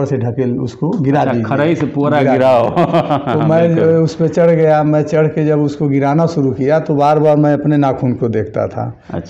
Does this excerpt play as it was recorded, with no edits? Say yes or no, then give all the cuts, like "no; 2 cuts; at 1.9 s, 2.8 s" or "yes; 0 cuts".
yes; 0 cuts